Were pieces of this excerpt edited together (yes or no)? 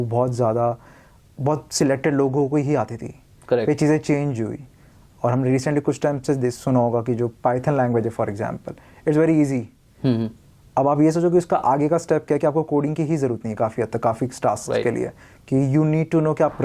no